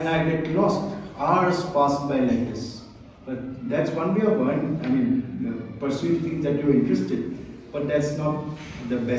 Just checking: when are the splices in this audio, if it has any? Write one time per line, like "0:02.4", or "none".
none